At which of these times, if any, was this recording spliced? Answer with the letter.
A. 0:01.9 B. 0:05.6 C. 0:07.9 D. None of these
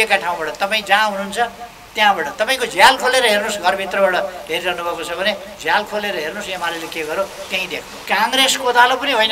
C